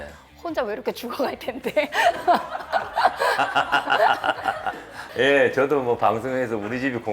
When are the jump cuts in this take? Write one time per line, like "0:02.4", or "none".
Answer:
0:05.1